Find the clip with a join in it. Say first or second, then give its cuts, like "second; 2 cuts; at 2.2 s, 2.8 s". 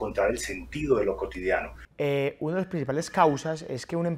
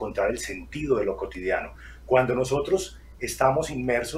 first; 1 cut; at 1.8 s